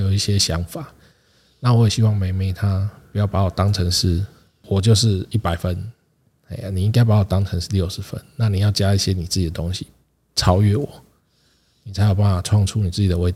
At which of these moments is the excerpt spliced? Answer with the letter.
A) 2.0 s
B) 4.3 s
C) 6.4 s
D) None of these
D